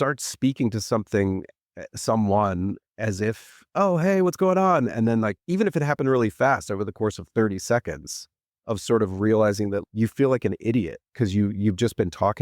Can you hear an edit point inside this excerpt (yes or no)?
yes